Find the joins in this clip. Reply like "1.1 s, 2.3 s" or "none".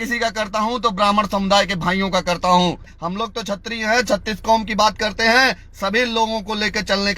2.9 s